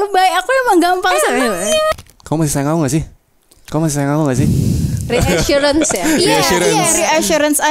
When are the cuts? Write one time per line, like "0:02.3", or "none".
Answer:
0:01.9